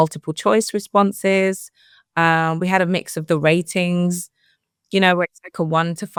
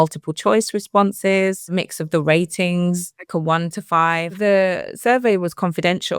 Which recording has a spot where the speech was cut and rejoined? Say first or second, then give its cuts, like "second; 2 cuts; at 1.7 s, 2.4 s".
second; 3 cuts; at 1.7 s, 3.2 s, 4.4 s